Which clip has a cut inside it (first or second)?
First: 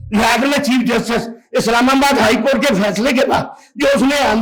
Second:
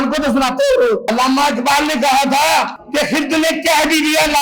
second